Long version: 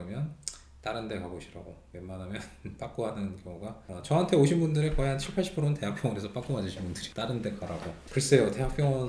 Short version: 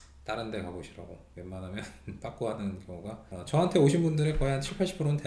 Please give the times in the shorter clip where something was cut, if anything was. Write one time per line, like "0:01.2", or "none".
none

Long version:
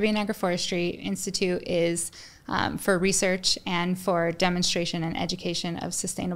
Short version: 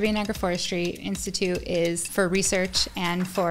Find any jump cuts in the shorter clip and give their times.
0:02.1

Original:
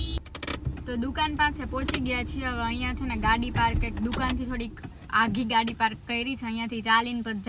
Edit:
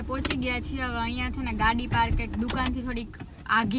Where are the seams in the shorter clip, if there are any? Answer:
none

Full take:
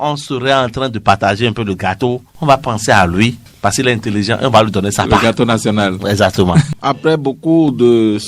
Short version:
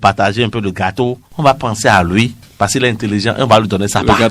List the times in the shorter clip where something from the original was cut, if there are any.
none

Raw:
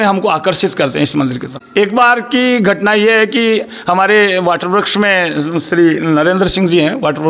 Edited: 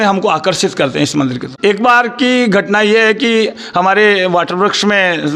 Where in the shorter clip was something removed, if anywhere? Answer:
0:01.5

